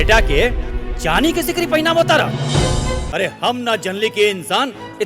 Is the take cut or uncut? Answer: cut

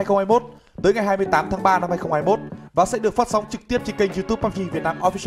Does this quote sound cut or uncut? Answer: uncut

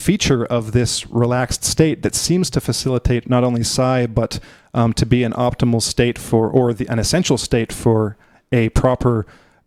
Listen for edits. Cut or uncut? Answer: uncut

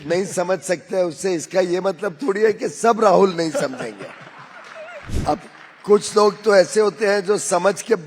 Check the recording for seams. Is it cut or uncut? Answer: cut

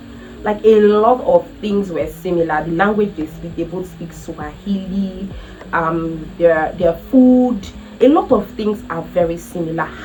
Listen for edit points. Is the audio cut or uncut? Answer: uncut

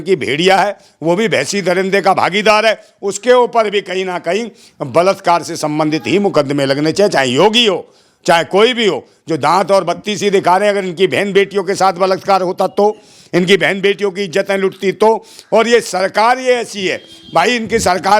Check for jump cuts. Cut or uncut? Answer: uncut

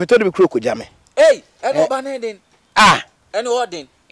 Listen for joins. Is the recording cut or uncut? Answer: uncut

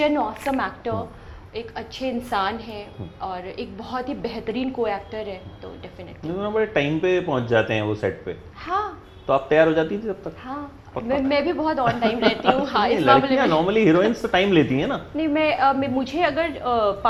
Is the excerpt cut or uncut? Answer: uncut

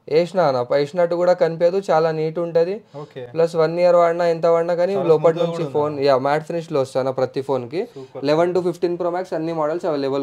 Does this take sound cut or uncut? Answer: uncut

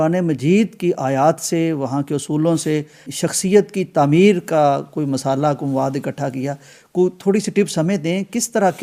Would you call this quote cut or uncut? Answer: uncut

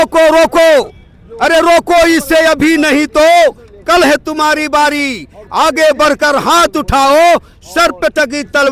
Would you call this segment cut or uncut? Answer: uncut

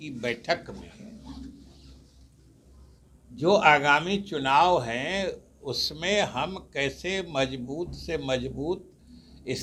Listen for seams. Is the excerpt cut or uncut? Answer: uncut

